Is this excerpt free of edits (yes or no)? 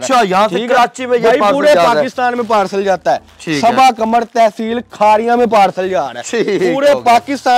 yes